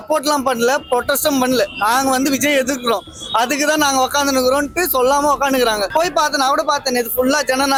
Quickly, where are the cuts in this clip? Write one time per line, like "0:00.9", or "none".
none